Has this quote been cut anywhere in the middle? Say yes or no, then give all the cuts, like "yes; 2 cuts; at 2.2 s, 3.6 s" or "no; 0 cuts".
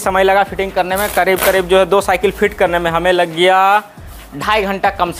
no; 0 cuts